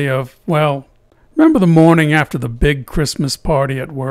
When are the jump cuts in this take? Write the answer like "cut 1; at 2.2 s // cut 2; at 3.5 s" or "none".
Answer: none